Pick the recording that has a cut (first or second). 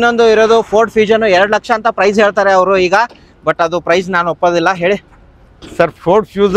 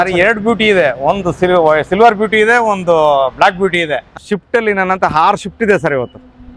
second